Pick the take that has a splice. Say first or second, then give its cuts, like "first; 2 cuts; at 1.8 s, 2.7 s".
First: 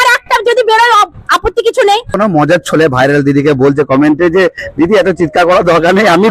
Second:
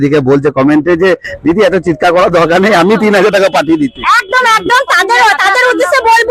first; 1 cut; at 2.1 s